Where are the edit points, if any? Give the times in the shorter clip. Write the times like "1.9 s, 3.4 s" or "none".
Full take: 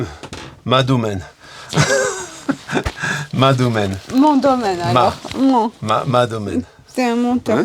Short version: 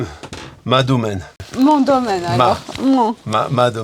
1.4 s